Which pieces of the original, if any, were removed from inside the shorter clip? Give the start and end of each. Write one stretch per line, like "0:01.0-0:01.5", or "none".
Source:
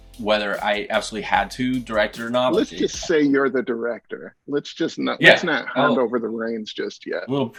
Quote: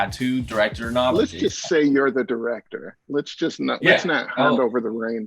none